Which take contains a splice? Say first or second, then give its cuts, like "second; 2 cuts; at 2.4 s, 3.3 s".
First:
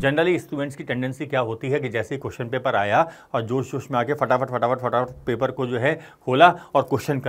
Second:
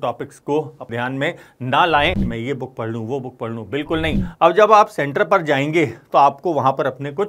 second; 3 cuts; at 0.9 s, 2.3 s, 4.2 s